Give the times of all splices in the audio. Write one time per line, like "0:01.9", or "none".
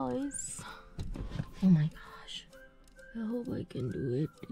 none